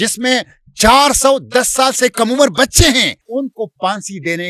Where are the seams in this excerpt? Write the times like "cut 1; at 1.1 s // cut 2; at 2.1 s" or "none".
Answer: cut 1; at 3.2 s